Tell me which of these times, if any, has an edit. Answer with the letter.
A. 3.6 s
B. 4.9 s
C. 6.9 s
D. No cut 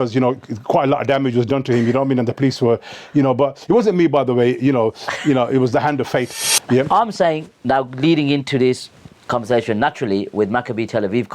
C